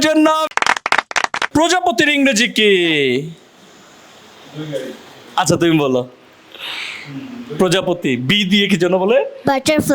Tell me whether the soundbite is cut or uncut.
cut